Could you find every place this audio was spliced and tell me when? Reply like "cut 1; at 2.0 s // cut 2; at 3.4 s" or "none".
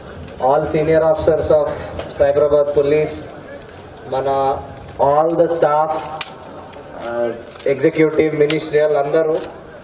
none